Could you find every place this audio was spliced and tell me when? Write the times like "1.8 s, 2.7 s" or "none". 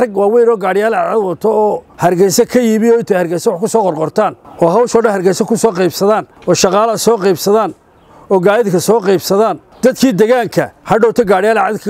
1.9 s, 4.4 s, 6.3 s, 10.8 s